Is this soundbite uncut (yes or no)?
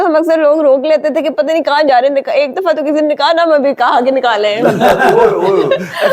yes